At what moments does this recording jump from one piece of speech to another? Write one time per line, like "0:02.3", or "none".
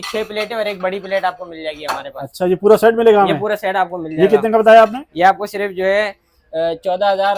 none